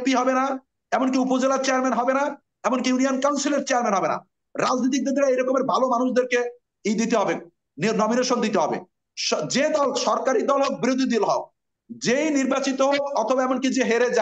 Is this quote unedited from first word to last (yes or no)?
yes